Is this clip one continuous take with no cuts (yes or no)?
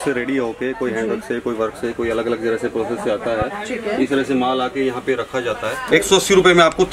no